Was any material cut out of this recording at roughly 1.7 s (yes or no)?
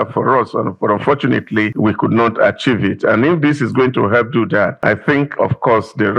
yes